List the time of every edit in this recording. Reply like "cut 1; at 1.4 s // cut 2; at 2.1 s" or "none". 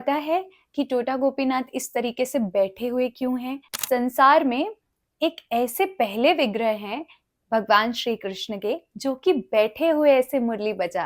cut 1; at 3.7 s